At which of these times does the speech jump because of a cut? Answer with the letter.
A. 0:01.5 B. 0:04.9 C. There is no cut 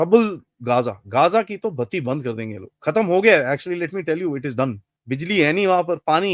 B